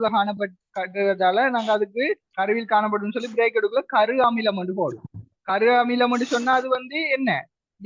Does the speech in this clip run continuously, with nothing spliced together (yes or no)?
yes